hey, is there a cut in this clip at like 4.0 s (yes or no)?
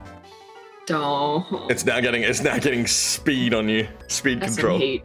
yes